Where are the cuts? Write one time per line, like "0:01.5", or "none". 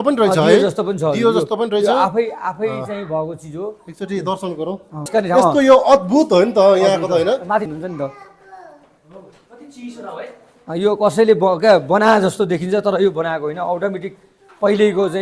0:05.1
0:07.7